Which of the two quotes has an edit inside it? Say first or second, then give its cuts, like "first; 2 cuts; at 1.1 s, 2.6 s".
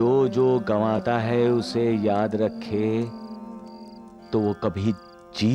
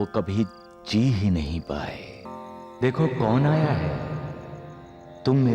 second; 1 cut; at 2.2 s